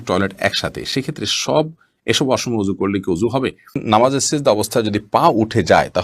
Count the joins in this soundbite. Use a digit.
1